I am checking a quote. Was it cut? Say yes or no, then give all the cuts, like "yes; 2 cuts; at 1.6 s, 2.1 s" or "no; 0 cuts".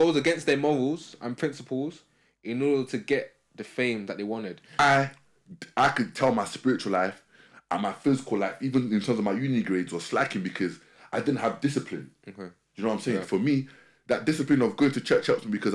yes; 1 cut; at 4.8 s